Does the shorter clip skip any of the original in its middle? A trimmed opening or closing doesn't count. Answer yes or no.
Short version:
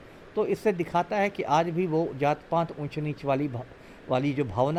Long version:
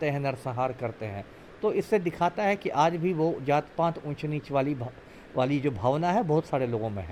no